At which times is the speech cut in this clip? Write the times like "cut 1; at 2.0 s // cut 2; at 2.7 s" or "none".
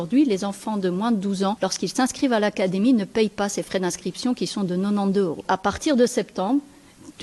cut 1; at 1.6 s // cut 2; at 5.4 s